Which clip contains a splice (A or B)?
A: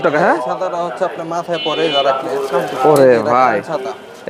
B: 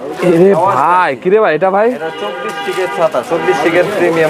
A